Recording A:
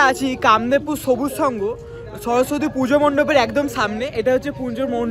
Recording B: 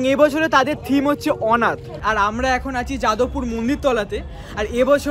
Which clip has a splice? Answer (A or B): B